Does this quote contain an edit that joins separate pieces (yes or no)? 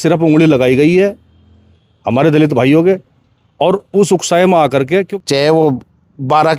yes